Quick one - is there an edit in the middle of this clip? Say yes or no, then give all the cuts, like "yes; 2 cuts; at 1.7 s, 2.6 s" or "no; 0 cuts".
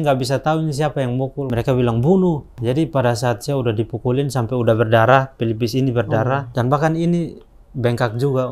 yes; 3 cuts; at 1.5 s, 2.5 s, 6.5 s